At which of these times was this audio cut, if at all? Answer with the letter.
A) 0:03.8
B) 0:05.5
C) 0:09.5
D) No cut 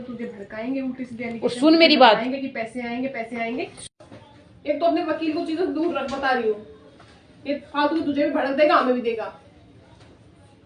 A